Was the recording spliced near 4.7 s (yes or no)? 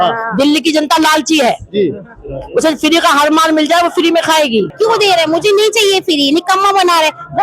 yes